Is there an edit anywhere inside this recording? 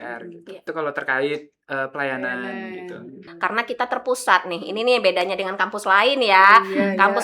yes; 1 cut; at 3.2 s

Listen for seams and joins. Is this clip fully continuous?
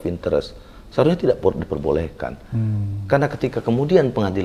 yes; 0 cuts

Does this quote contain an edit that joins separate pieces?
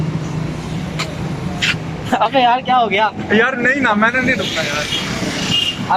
no; 0 cuts

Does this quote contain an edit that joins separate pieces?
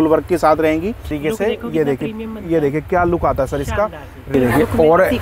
yes; 2 cuts; at 1.2 s, 4.3 s

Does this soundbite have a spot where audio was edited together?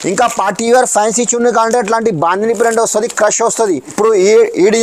yes; 1 cut; at 3.9 s

